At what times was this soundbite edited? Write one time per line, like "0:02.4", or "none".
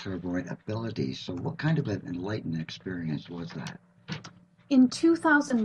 none